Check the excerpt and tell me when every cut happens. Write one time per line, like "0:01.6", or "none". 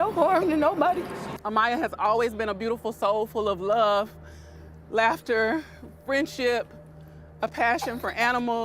0:01.3